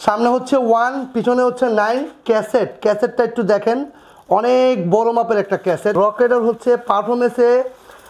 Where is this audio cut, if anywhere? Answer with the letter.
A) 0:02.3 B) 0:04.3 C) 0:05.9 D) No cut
C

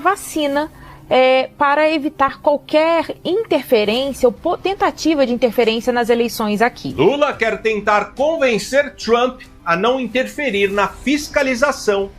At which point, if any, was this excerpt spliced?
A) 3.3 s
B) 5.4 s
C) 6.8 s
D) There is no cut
C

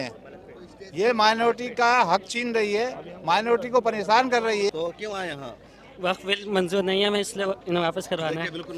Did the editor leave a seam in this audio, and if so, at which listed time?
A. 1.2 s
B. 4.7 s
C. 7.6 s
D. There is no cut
B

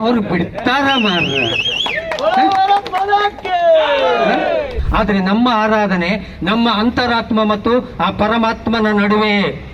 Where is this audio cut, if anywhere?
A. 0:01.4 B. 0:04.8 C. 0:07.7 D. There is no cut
B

